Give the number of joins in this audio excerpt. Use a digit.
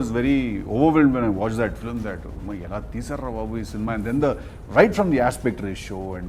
0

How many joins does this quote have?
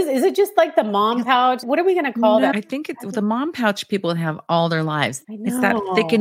3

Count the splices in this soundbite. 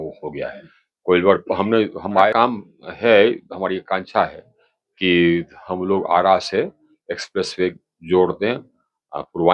1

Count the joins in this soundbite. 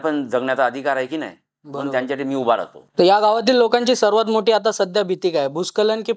0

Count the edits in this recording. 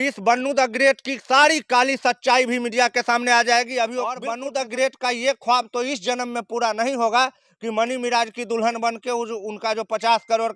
1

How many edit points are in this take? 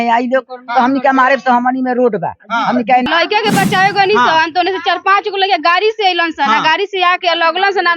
1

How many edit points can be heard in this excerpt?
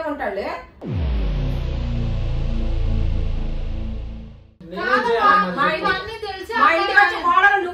1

